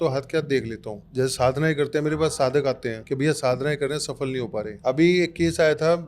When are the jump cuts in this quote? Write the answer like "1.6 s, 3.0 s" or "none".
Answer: 1.0 s, 3.0 s, 4.7 s